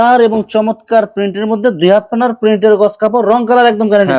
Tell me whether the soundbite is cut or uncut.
uncut